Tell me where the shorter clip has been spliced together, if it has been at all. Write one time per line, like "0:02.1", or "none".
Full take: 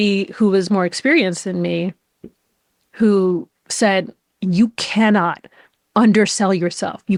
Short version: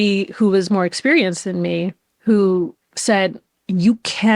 0:02.1